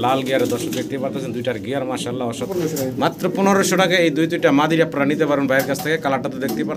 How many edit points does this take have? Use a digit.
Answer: 1